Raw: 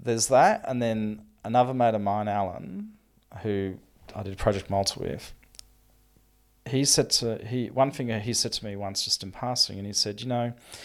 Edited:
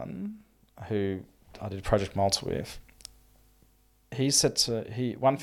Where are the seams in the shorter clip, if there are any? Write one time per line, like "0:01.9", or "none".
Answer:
none